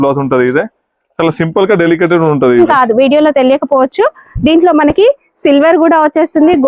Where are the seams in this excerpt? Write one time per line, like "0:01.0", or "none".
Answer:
0:02.6